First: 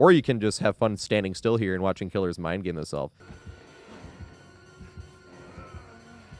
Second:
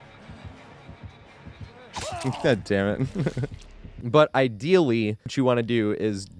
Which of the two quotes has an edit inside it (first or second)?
first